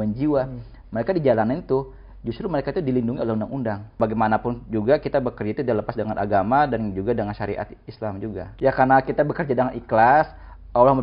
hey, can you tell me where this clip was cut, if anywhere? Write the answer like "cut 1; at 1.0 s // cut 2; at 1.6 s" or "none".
cut 1; at 4.0 s // cut 2; at 8.5 s